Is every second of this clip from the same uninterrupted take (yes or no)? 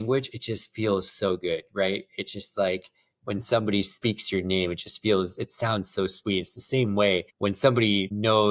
no